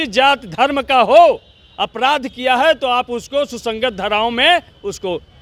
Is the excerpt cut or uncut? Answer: uncut